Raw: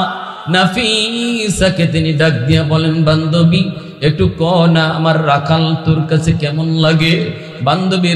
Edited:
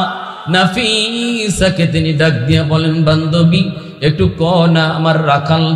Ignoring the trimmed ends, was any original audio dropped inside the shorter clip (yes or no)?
no